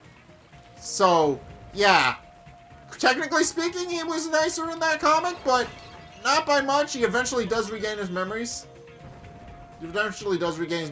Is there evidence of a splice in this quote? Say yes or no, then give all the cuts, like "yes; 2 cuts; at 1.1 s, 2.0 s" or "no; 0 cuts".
yes; 1 cut; at 1.0 s